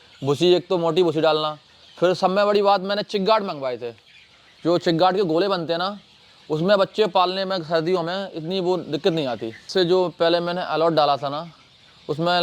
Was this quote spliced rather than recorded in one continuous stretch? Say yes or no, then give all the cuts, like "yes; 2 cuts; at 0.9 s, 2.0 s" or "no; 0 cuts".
yes; 1 cut; at 9.7 s